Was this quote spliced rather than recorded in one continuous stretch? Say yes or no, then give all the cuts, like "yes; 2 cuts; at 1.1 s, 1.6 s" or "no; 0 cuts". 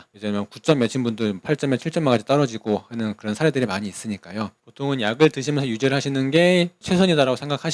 no; 0 cuts